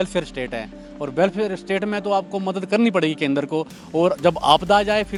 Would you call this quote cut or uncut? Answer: uncut